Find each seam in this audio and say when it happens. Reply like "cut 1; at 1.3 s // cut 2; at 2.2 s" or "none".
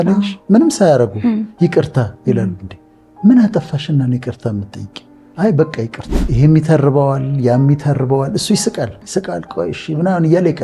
cut 1; at 6.1 s // cut 2; at 9.0 s